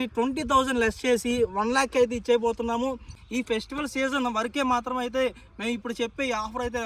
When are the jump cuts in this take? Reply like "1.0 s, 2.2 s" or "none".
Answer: 3.1 s